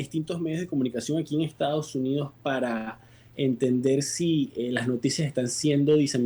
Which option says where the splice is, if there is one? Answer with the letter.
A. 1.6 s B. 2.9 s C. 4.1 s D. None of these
D